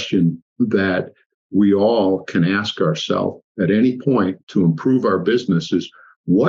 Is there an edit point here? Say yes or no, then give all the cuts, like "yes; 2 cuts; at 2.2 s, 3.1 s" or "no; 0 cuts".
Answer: no; 0 cuts